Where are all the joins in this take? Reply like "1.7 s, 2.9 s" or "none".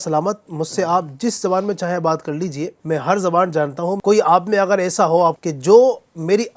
2.8 s, 4.0 s, 5.4 s